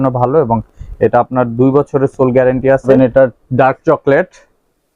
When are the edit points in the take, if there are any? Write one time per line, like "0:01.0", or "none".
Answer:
0:02.9